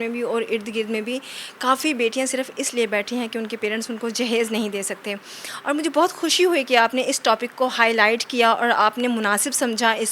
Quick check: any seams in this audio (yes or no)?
no